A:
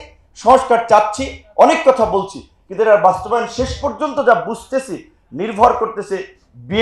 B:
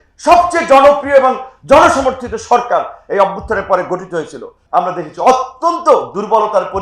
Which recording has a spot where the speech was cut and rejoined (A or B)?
B